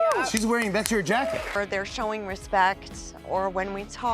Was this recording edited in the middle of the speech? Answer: yes; 1 cut; at 1.5 s

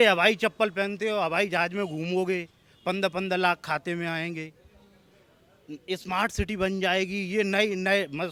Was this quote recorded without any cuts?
yes; 0 cuts

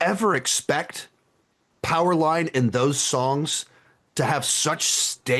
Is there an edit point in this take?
no; 0 cuts

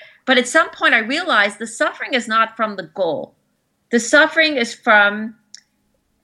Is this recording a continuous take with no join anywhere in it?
yes; 0 cuts

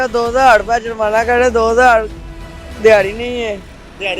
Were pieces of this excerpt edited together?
no; 0 cuts

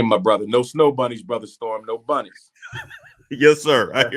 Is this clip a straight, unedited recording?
yes; 0 cuts

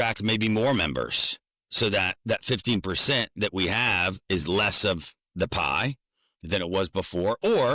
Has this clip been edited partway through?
no; 0 cuts

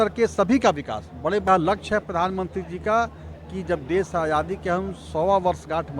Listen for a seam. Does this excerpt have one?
yes; 1 cut; at 1.5 s

